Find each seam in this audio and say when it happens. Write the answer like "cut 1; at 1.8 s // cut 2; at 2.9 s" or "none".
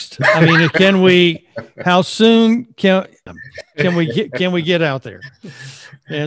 cut 1; at 3.3 s